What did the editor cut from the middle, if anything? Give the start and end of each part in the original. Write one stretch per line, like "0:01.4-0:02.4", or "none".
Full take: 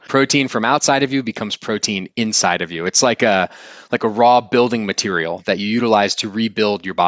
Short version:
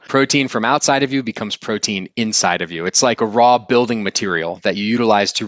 0:03.2-0:04.0

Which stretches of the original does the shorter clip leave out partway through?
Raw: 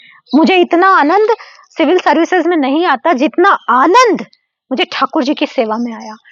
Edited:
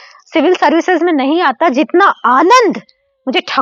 none

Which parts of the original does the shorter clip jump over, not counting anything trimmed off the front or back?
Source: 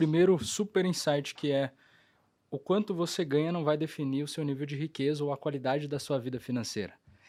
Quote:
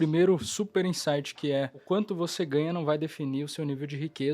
0:01.8-0:02.6

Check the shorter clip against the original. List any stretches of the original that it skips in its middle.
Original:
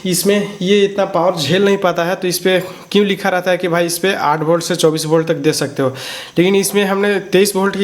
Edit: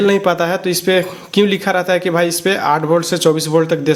none

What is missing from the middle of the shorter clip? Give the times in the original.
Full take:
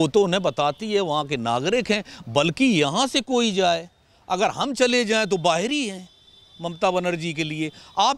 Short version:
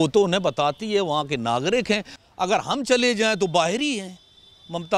0:02.1-0:04.1

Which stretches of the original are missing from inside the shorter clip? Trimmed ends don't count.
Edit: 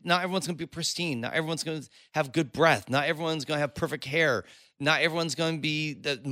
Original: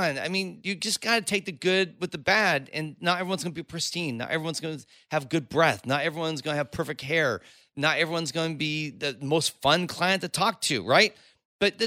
none

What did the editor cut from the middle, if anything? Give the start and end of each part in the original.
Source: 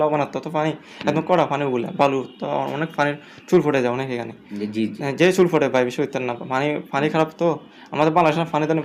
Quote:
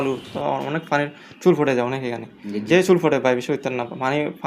0:04.7-0:05.1

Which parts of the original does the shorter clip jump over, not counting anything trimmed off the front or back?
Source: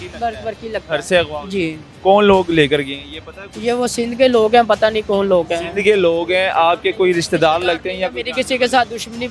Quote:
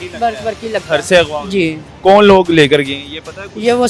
none

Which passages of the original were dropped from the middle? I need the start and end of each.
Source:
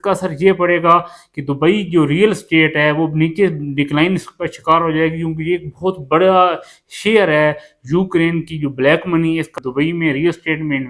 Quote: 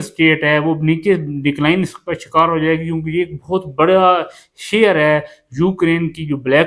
none

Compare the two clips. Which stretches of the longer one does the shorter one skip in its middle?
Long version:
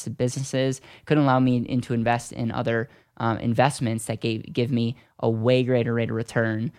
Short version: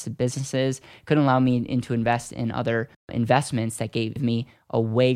0:03.1-0:03.4
0:04.5-0:04.7

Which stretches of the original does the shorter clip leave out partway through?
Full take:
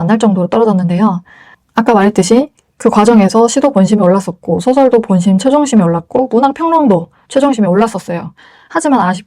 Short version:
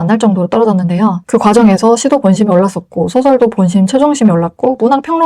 0:01.2-0:02.7

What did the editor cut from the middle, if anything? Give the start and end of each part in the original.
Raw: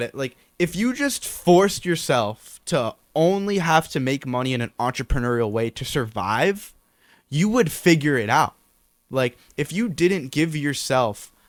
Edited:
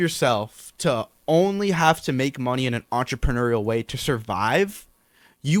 none

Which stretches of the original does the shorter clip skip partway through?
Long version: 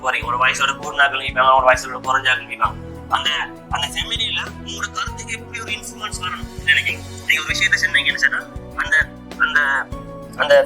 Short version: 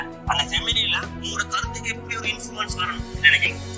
none

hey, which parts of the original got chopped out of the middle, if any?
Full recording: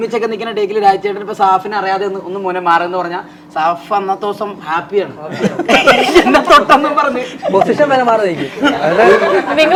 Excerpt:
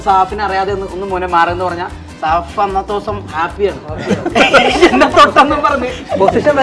none

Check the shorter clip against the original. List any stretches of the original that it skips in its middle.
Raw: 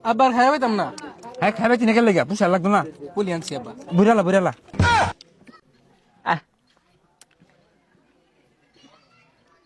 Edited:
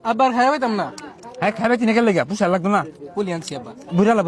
none

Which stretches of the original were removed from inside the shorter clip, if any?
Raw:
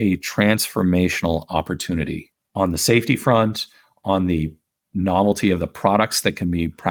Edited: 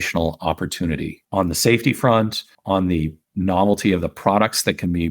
0:02.2-0:02.4
0:03.7-0:03.9
0:04.6-0:04.8

